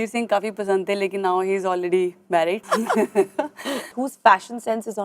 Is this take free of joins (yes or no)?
no